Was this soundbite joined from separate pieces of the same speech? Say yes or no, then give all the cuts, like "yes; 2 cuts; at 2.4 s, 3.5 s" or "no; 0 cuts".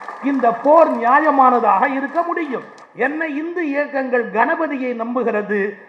yes; 1 cut; at 2.8 s